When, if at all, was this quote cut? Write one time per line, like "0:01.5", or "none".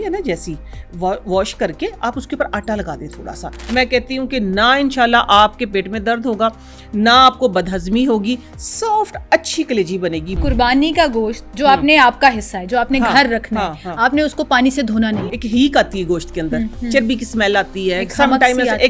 0:03.5
0:10.4
0:15.1